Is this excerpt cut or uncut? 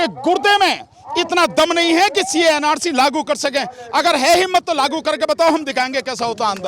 uncut